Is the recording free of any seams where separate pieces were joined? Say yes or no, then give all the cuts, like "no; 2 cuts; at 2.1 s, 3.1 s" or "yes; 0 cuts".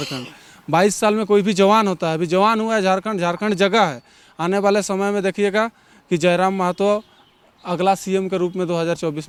yes; 0 cuts